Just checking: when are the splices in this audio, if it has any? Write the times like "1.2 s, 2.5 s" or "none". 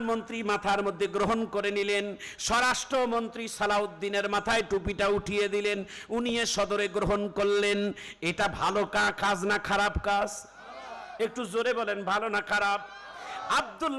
none